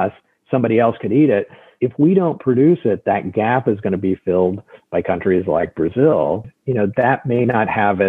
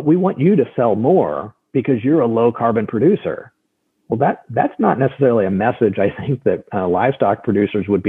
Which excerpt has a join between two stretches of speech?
first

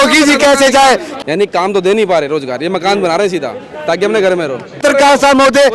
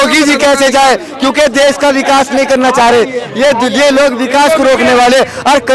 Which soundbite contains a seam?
first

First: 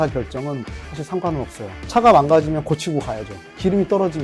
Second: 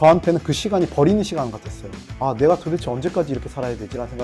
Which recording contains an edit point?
first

